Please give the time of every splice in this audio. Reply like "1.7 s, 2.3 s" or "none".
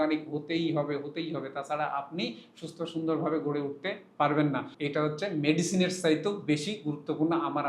4.7 s